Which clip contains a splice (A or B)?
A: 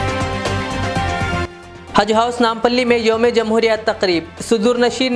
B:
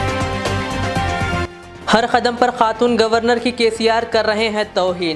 A